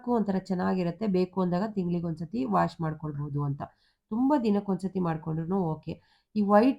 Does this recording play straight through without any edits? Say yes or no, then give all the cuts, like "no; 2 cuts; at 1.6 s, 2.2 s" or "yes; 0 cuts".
yes; 0 cuts